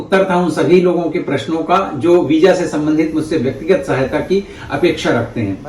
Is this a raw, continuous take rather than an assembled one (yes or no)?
yes